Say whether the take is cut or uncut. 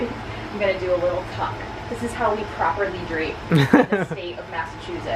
uncut